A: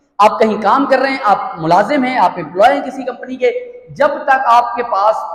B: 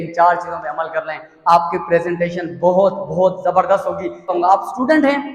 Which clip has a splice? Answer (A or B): B